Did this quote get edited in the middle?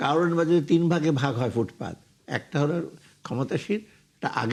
no; 0 cuts

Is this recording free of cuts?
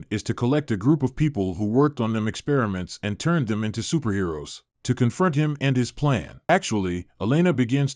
no; 1 cut; at 6.3 s

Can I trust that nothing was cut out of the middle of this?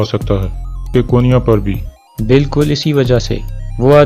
no; 1 cut; at 0.9 s

